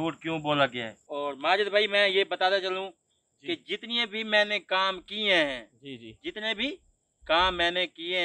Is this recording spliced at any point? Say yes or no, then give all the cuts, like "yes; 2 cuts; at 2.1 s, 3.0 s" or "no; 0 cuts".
yes; 1 cut; at 1.0 s